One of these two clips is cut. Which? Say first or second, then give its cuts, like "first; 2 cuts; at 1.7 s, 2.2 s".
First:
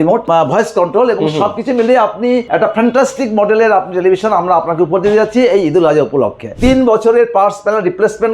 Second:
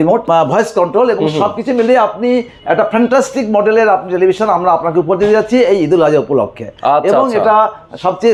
first; 2 cuts; at 2.4 s, 6.6 s